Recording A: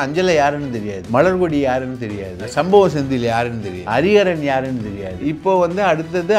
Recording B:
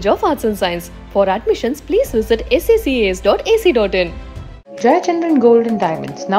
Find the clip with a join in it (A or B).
A